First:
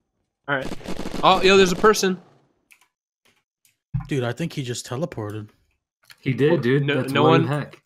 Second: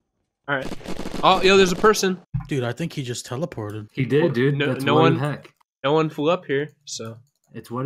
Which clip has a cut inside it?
second; 2 cuts; at 2.3 s, 3.8 s

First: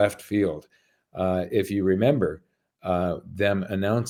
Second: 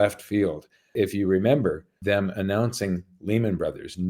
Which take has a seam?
second; 2 cuts; at 0.9 s, 1.9 s

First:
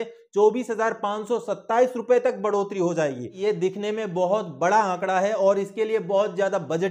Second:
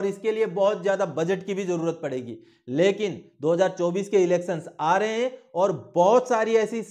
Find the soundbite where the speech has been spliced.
first; 1 cut; at 3.3 s

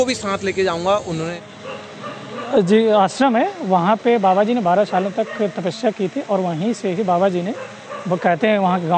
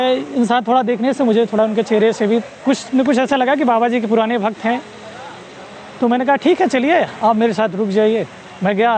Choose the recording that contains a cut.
first; 1 cut; at 1.3 s

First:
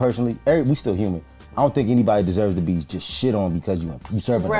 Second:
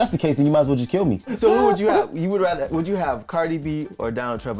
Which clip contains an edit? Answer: second; 1 cut; at 1.3 s

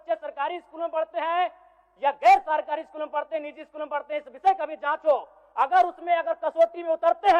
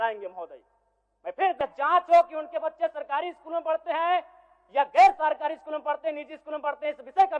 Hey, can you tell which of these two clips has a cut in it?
second; 1 cut; at 1.6 s

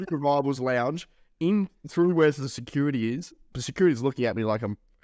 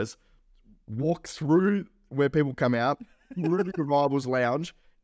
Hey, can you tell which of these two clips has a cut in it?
first; 1 cut; at 3.4 s

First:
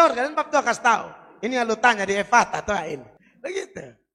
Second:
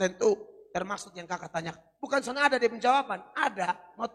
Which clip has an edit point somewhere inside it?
first; 1 cut; at 3.2 s

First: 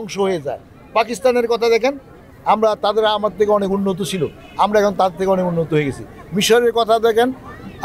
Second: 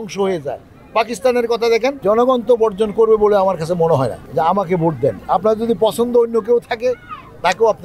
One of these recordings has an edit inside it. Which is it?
second; 3 cuts; at 2.0 s, 4.2 s, 5.2 s

